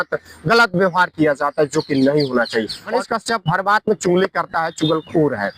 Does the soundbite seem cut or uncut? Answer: cut